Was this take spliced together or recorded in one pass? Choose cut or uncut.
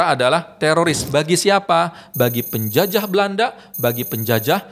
uncut